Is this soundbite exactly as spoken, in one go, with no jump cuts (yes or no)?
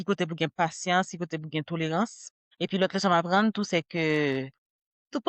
no